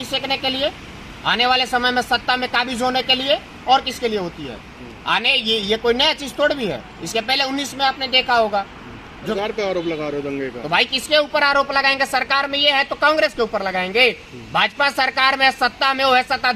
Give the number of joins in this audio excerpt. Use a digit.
1